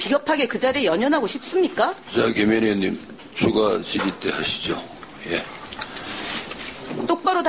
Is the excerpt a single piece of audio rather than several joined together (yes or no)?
no